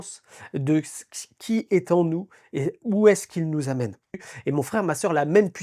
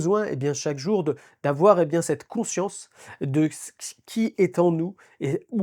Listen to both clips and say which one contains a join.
first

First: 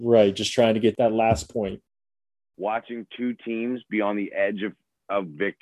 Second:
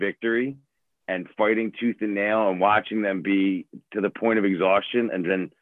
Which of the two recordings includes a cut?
first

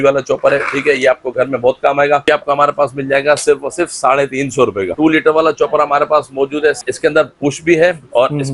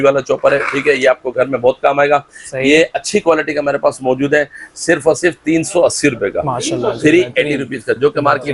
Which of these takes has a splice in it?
first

